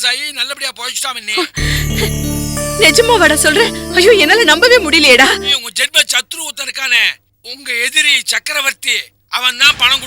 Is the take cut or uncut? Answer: cut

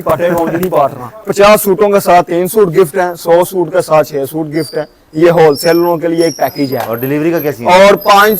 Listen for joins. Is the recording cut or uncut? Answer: cut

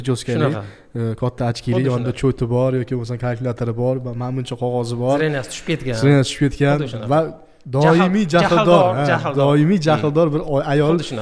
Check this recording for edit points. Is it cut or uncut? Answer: uncut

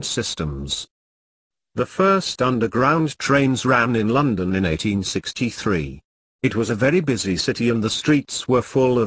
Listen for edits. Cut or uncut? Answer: uncut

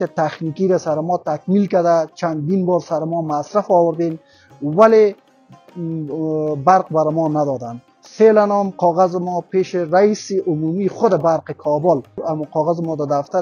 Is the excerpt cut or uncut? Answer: cut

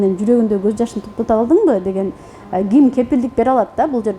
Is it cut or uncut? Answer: uncut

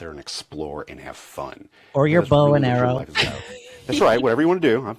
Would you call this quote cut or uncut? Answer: uncut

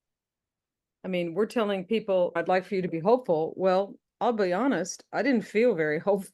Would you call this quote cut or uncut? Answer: uncut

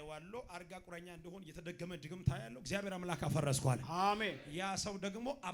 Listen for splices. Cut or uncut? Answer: uncut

